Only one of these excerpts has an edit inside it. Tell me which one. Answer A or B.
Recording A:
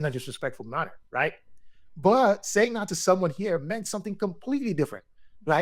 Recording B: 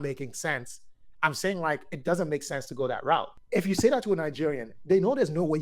B